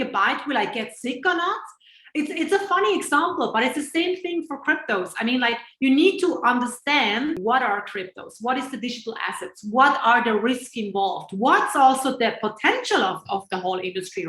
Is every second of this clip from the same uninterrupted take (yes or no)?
no